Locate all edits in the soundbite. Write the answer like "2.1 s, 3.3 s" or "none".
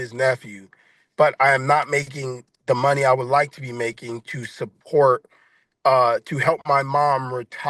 none